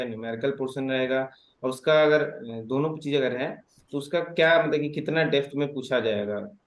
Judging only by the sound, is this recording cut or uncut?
uncut